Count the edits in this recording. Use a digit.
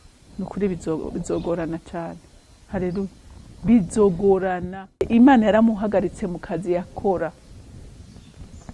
1